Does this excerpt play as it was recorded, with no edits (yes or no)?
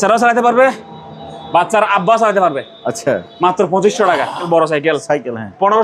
no